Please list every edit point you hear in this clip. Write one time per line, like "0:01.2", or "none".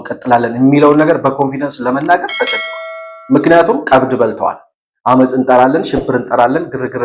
none